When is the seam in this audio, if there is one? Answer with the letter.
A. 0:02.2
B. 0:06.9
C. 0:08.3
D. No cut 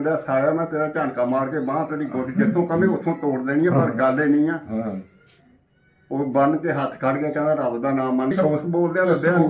C